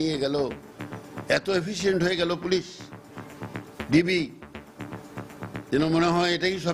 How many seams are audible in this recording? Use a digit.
0